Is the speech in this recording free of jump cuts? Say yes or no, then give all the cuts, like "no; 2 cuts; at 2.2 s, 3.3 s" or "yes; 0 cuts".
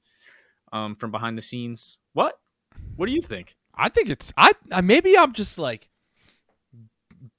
no; 1 cut; at 3.6 s